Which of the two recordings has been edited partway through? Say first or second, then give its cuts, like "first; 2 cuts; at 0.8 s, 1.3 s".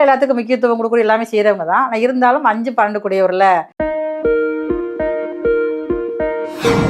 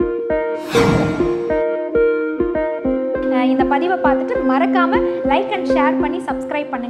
first; 1 cut; at 3.7 s